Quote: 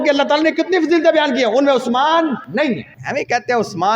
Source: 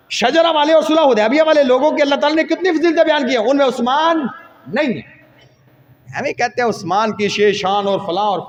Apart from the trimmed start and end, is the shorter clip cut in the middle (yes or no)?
yes